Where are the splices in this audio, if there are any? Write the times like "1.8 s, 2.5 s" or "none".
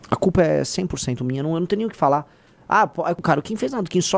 3.2 s